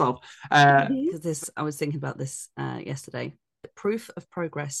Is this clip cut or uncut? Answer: cut